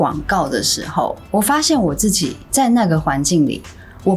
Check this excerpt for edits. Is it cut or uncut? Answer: uncut